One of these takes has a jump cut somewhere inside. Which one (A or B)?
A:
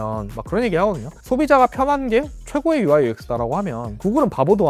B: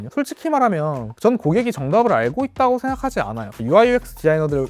B